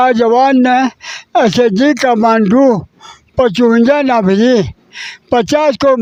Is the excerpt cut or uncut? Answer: uncut